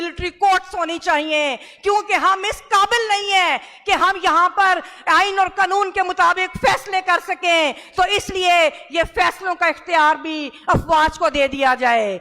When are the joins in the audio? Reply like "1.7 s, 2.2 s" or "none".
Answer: none